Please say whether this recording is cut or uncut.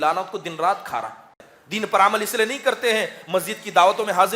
cut